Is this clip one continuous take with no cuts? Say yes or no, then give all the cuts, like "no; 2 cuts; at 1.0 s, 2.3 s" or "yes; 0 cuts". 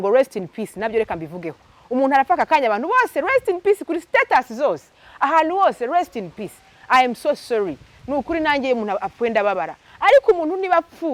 yes; 0 cuts